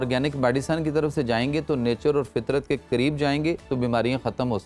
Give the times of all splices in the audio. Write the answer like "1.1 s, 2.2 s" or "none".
none